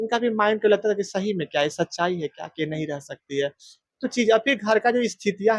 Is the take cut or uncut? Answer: uncut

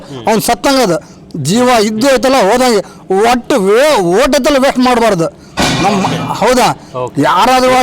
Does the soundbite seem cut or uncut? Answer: uncut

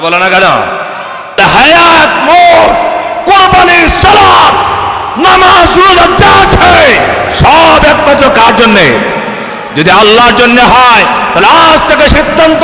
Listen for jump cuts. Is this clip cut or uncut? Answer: cut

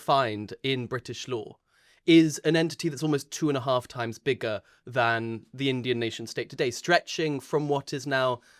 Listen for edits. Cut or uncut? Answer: uncut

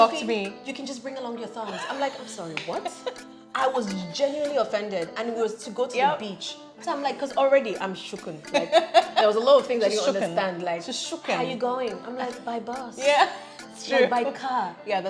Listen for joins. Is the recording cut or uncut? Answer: uncut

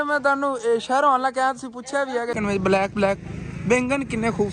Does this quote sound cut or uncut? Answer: cut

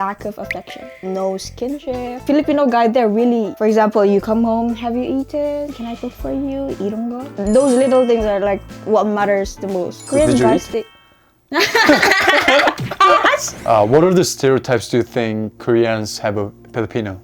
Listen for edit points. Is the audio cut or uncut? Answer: cut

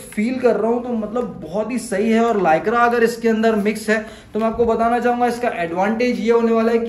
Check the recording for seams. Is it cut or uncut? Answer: uncut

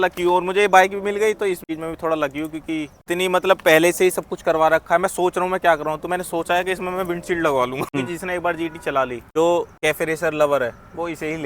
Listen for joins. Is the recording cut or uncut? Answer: cut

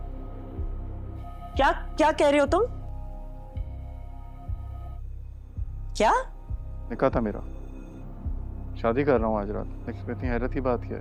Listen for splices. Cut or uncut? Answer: uncut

